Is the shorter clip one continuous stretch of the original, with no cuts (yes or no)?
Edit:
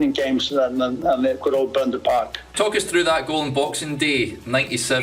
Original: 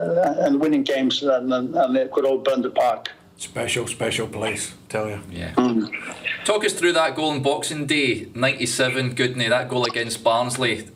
no